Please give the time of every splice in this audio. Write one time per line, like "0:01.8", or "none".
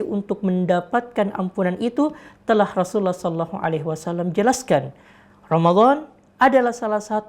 0:05.0